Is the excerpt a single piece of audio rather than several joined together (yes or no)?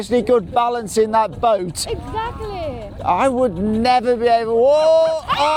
yes